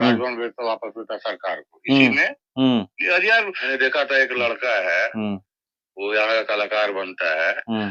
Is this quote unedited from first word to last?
no; 1 cut; at 3.7 s

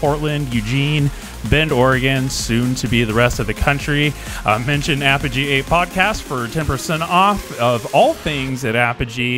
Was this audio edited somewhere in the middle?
no; 0 cuts

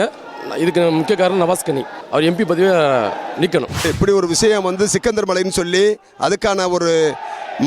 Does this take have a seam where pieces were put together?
yes; 2 cuts; at 1.9 s, 3.9 s

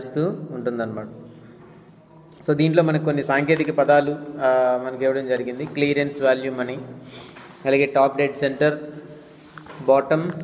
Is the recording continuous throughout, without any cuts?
no; 1 cut; at 7.5 s

